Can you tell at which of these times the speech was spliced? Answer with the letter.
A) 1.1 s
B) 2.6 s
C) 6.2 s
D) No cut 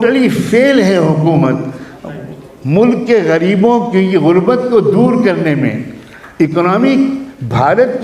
D